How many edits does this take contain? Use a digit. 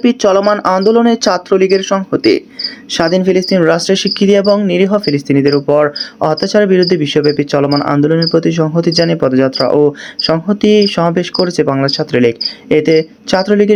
0